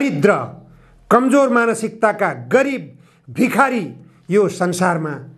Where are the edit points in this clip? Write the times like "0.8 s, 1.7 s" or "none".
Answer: none

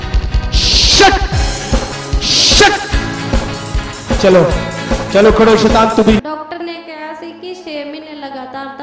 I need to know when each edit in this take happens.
6.3 s

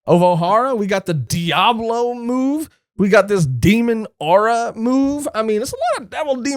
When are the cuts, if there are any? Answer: 1.3 s

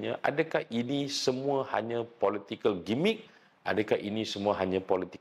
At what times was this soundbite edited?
none

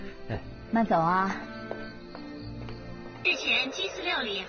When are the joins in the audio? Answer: 3.2 s

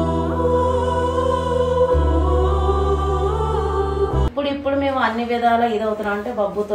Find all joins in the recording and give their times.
4.3 s

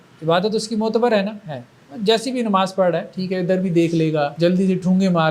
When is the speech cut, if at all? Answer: 4.3 s

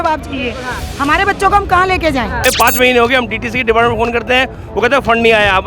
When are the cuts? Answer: 2.5 s

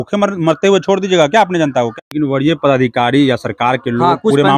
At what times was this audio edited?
1.9 s

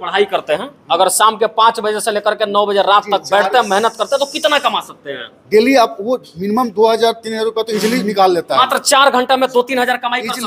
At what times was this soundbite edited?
none

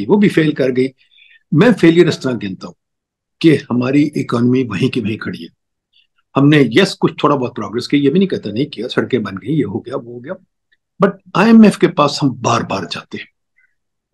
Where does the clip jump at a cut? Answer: none

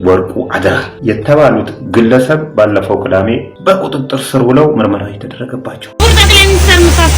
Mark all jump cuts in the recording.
0.9 s, 3.5 s, 5.8 s

